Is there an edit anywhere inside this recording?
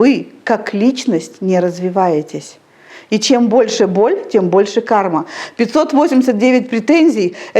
no; 0 cuts

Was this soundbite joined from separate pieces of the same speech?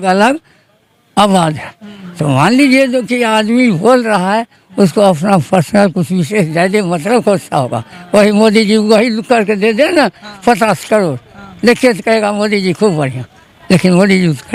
no; 0 cuts

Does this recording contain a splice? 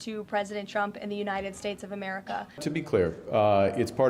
yes; 1 cut; at 2.6 s

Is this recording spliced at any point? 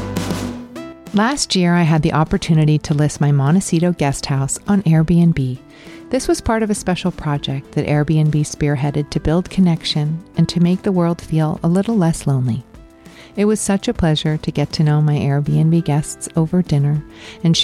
yes; 1 cut; at 1.0 s

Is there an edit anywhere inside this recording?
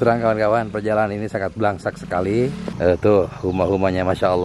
yes; 1 cut; at 2.7 s

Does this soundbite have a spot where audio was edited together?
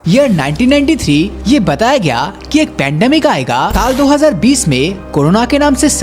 yes; 2 cuts; at 1.4 s, 3.8 s

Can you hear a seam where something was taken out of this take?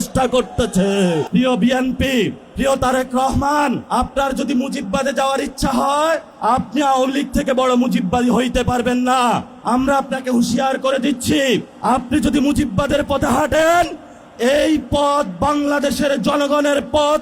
yes; 6 cuts; at 1.3 s, 2.4 s, 3.8 s, 6.3 s, 9.5 s, 11.7 s

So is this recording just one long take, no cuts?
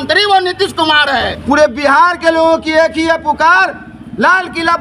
no; 1 cut; at 1.3 s

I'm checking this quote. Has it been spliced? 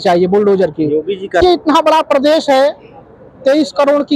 yes; 1 cut; at 1.4 s

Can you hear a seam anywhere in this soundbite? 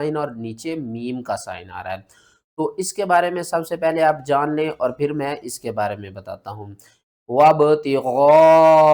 no; 0 cuts

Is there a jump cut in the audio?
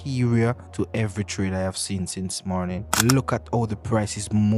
yes; 2 cuts; at 0.8 s, 2.9 s

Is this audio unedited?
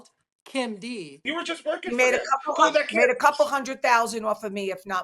no; 1 cut; at 1.1 s

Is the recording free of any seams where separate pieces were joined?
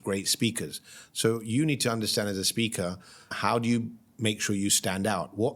no; 1 cut; at 3.3 s

